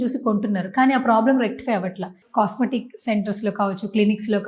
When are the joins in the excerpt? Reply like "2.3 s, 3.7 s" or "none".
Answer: 2.2 s